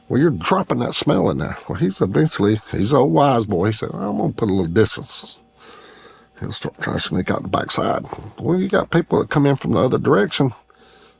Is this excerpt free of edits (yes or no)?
yes